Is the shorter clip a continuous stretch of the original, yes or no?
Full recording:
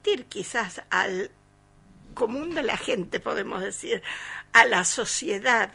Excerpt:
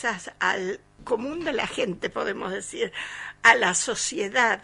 no